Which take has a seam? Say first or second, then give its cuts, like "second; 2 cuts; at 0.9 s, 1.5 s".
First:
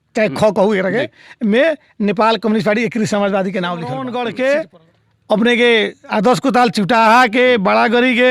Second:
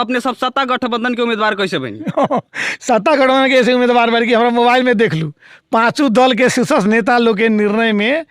first; 1 cut; at 4.0 s